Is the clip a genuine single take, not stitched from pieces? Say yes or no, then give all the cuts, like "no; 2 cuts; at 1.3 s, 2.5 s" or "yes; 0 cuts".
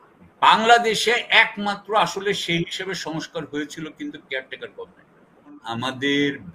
no; 1 cut; at 5.6 s